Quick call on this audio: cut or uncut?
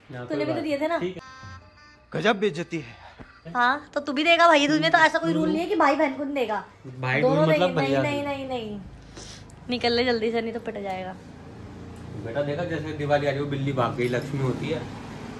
uncut